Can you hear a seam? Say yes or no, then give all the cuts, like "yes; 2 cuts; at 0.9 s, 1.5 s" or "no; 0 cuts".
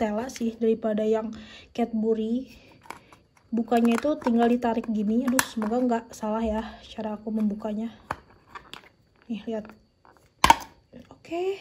no; 0 cuts